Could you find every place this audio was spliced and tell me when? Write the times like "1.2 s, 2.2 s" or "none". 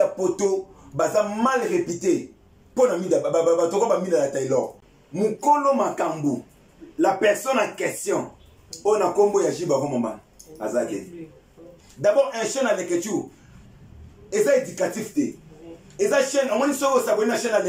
4.8 s, 11.7 s